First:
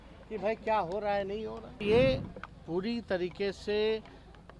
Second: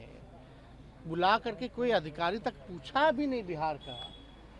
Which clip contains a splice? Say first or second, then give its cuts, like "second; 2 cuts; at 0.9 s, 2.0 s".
first; 1 cut; at 1.8 s